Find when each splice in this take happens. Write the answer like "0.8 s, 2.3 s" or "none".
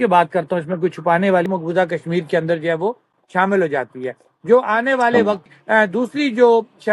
1.4 s, 5.4 s

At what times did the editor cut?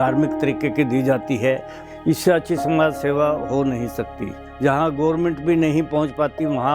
1.8 s, 4.3 s

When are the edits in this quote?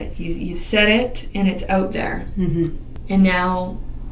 2.9 s

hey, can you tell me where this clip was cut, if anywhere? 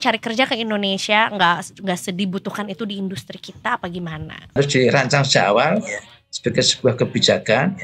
4.6 s

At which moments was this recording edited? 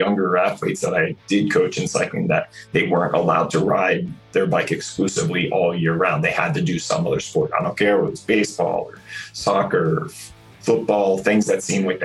none

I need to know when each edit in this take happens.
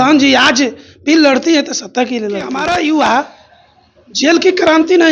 2.5 s

